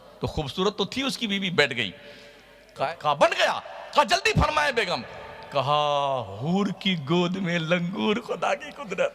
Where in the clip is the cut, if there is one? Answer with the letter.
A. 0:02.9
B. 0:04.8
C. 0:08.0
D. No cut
A